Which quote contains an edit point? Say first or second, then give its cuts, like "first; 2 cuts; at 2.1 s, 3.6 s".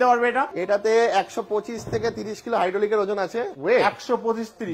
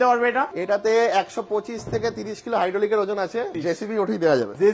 second; 1 cut; at 3.5 s